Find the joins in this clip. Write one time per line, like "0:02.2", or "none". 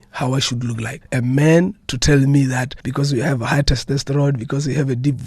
0:00.9
0:02.8